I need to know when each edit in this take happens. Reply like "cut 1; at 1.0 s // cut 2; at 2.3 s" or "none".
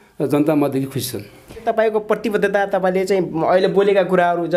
cut 1; at 1.6 s

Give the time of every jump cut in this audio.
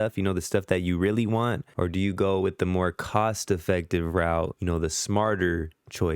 cut 1; at 1.7 s // cut 2; at 4.6 s

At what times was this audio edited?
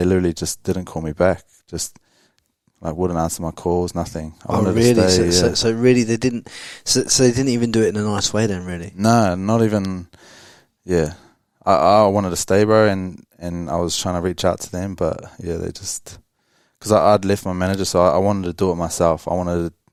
none

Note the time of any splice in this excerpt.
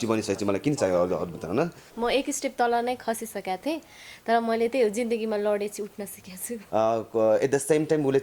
cut 1; at 1.9 s // cut 2; at 6.6 s

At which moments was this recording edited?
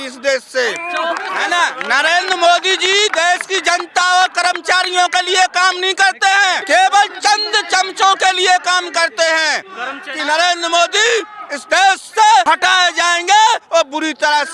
cut 1; at 1.3 s // cut 2; at 6.6 s // cut 3; at 10.1 s // cut 4; at 12.4 s

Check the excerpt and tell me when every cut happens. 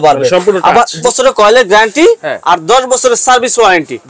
cut 1; at 1.0 s

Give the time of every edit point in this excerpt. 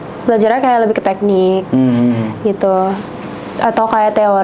none

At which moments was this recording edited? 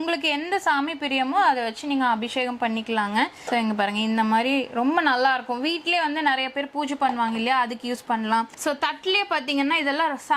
none

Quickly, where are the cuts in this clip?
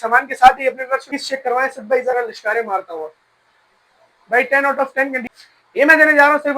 cut 1; at 1.1 s // cut 2; at 5.3 s

